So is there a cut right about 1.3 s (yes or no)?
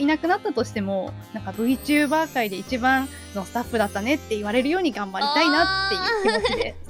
no